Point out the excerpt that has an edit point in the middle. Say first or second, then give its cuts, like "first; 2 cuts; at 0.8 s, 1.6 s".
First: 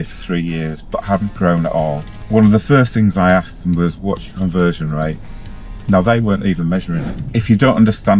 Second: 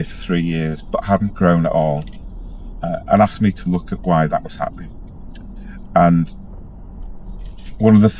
first; 2 cuts; at 2.1 s, 7.1 s